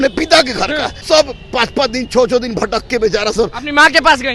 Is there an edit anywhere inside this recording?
yes; 1 cut; at 0.9 s

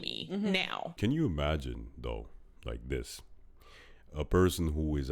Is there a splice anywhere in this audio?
yes; 1 cut; at 1.0 s

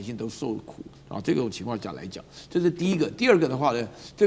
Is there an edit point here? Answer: no; 0 cuts

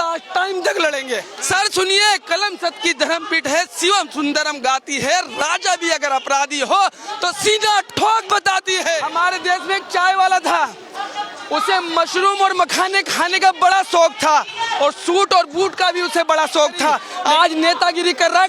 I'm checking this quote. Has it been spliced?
yes; 3 cuts; at 1.3 s, 9.0 s, 17.1 s

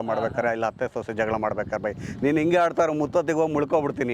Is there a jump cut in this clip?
no; 0 cuts

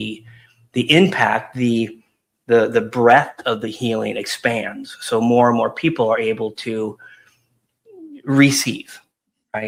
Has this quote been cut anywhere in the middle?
no; 0 cuts

